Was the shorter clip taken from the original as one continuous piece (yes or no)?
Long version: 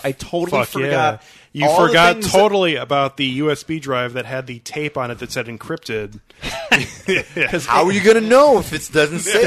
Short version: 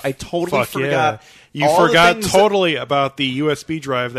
yes